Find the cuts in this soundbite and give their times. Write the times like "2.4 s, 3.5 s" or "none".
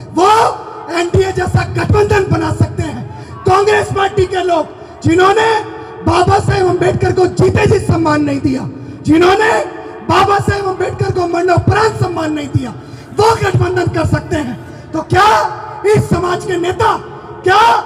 none